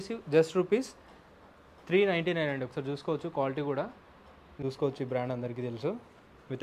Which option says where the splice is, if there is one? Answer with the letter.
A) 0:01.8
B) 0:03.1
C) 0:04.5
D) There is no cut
C